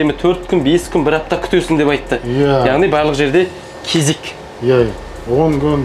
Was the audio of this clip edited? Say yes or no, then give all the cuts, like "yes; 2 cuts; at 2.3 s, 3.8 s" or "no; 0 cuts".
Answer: no; 0 cuts